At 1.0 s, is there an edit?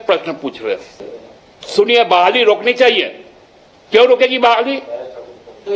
yes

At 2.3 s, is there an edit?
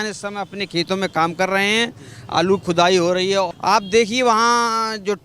no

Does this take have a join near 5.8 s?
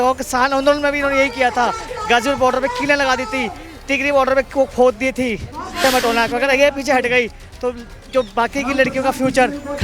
yes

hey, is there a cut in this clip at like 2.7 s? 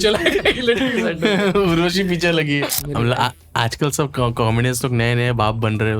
yes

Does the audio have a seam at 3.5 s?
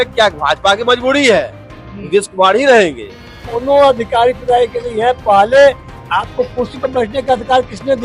yes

